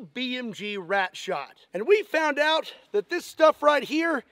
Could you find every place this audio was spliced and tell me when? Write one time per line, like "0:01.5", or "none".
none